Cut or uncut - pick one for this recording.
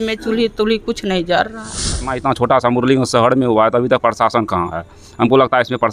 cut